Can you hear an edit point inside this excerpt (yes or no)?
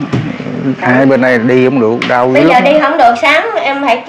no